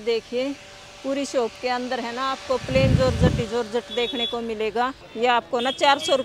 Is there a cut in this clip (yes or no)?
yes